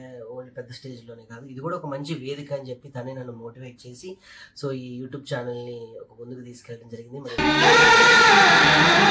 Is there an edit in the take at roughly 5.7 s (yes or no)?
no